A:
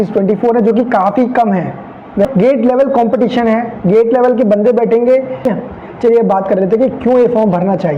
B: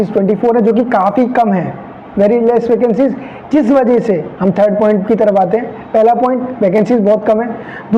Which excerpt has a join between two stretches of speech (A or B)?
A